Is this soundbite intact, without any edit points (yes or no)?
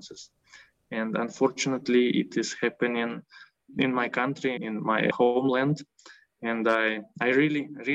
yes